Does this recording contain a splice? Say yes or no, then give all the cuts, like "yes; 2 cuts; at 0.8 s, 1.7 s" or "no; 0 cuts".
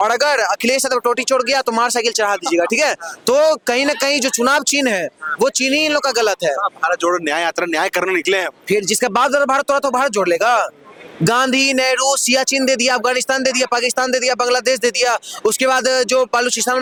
no; 0 cuts